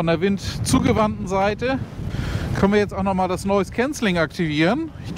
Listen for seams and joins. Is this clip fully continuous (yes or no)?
yes